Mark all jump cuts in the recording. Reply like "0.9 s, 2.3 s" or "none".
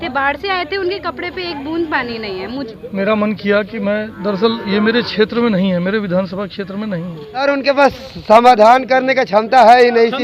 2.6 s, 7.4 s